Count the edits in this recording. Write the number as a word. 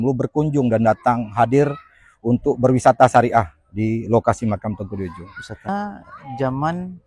one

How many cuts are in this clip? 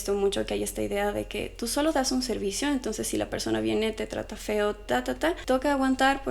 one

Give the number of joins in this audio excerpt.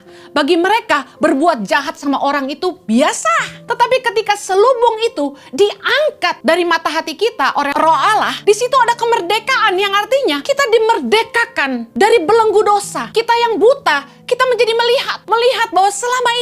seven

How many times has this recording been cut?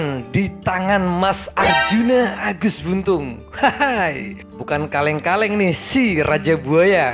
zero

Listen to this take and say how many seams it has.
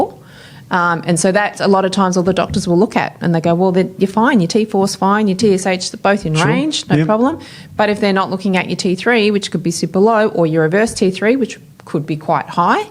zero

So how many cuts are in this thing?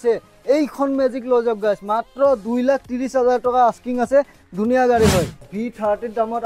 one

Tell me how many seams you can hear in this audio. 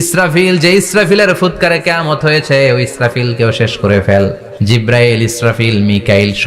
one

